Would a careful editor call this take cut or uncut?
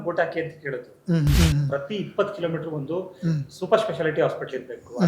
cut